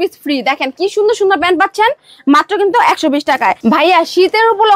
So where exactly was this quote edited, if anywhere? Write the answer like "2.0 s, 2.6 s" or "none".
none